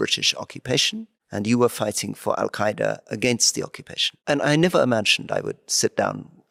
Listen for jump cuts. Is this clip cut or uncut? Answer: uncut